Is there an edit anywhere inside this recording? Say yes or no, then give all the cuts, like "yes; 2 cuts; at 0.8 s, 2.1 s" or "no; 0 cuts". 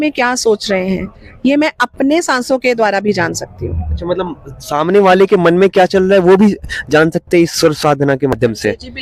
no; 0 cuts